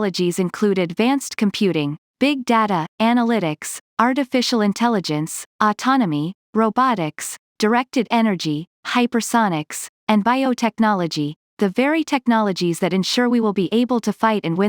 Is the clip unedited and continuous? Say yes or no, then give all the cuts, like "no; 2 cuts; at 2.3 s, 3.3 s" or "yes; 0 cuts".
yes; 0 cuts